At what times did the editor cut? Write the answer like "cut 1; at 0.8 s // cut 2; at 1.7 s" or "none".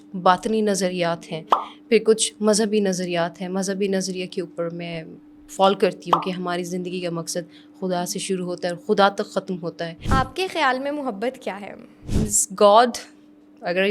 cut 1; at 10.1 s // cut 2; at 12.0 s